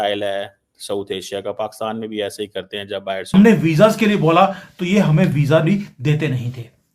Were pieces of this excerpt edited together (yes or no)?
yes